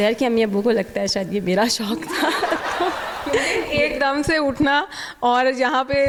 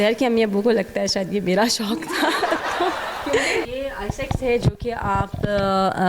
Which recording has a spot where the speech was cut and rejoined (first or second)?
second